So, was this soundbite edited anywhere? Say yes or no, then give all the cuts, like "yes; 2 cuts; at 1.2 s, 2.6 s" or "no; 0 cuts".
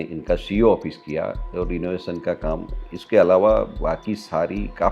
no; 0 cuts